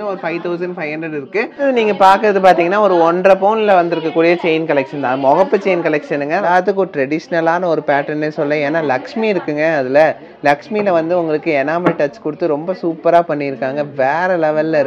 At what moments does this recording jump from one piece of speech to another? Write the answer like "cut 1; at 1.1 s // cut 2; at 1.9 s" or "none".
cut 1; at 1.6 s // cut 2; at 6.5 s